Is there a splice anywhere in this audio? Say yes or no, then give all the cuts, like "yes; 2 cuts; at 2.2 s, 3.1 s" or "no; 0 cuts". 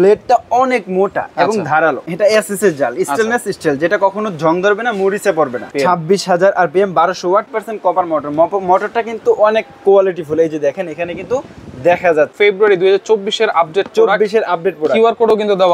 yes; 4 cuts; at 2.0 s, 5.7 s, 7.5 s, 12.3 s